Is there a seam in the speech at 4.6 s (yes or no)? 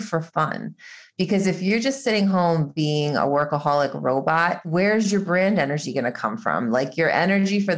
yes